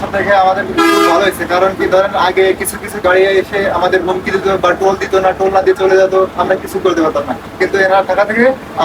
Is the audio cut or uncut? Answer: uncut